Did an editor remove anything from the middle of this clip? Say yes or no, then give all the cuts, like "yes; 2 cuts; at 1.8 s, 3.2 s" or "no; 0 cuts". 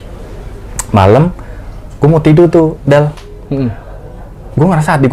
no; 0 cuts